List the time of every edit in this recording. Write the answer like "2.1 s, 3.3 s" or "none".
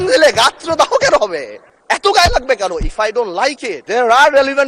none